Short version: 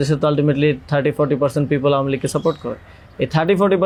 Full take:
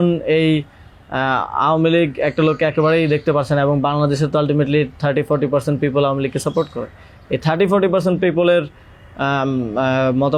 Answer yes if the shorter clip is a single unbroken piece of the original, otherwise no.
yes